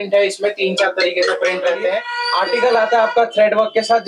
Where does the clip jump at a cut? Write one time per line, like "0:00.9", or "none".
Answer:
0:02.1